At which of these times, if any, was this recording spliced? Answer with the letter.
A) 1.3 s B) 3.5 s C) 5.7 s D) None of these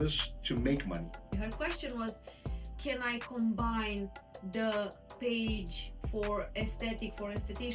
A